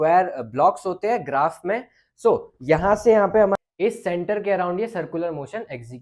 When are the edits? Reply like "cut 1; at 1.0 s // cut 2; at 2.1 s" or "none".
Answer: cut 1; at 3.6 s